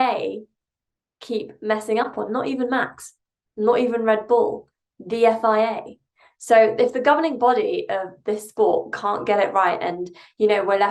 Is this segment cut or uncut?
uncut